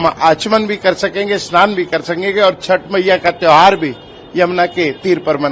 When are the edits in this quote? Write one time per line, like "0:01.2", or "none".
none